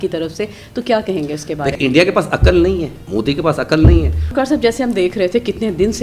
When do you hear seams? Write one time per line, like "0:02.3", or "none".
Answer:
0:01.7
0:03.0
0:04.3